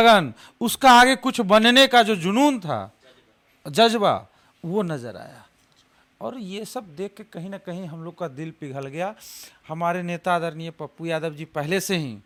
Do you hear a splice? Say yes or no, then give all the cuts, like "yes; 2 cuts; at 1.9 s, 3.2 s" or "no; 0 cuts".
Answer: no; 0 cuts